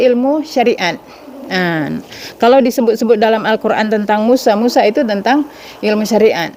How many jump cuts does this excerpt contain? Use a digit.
0